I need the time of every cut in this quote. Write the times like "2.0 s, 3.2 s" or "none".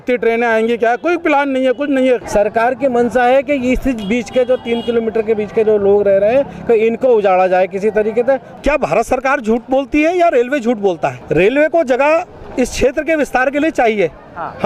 2.2 s, 8.5 s, 11.2 s